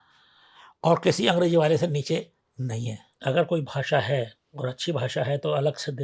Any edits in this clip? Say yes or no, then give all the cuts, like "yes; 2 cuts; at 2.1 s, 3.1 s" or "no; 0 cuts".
yes; 1 cut; at 3.1 s